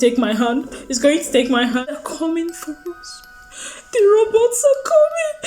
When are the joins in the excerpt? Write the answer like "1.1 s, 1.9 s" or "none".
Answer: 1.9 s